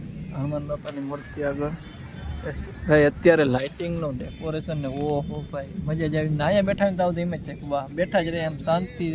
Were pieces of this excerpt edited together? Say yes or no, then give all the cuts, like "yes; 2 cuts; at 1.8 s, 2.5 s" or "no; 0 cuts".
no; 0 cuts